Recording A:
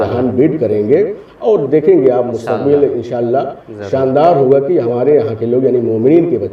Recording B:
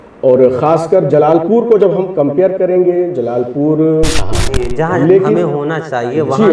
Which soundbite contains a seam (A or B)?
B